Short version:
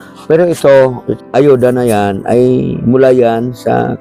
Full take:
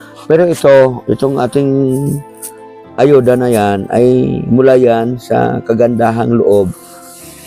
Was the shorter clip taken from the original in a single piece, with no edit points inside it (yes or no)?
no